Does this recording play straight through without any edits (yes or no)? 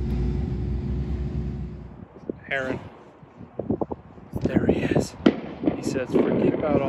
no